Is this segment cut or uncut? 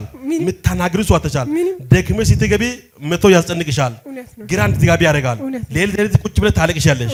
uncut